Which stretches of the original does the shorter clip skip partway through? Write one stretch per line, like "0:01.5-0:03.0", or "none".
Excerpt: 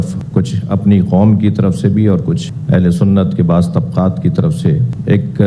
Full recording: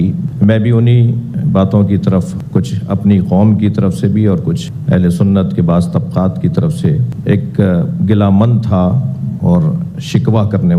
none